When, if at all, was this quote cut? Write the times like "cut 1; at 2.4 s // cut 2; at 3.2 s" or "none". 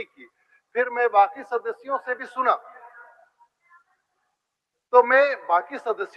none